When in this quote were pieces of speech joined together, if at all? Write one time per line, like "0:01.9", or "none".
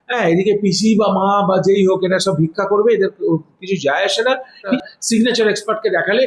0:04.7